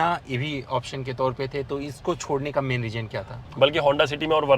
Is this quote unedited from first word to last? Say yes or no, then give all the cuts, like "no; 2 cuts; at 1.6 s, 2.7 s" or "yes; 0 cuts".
no; 1 cut; at 3.3 s